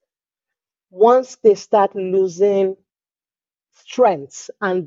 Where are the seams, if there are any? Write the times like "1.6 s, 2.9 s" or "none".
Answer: none